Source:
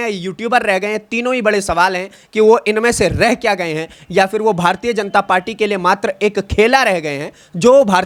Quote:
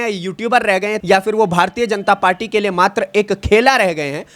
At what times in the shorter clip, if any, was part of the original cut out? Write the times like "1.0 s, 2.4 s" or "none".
1.0 s